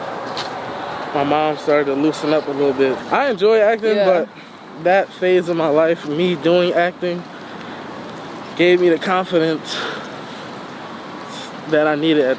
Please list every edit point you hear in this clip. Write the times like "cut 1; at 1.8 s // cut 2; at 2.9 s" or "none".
cut 1; at 3.0 s